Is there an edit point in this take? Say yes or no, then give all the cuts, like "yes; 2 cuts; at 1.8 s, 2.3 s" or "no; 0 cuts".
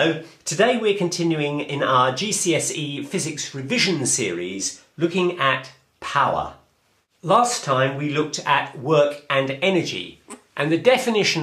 no; 0 cuts